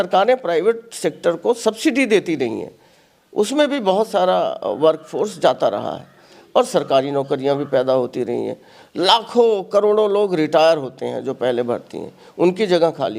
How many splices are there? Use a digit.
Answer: 0